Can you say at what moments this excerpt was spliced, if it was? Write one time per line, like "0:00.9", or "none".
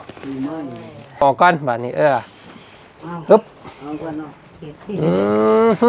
0:01.2